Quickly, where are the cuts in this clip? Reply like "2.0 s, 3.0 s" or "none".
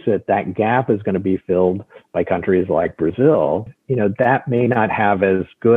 3.8 s